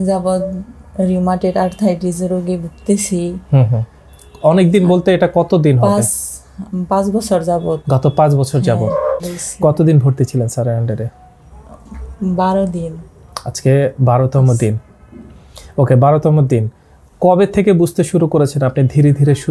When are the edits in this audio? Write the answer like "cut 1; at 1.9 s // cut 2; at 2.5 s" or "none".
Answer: cut 1; at 9.3 s